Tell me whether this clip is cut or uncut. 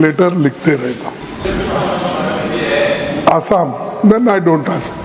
cut